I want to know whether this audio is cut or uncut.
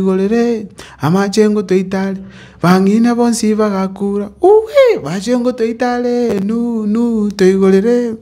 uncut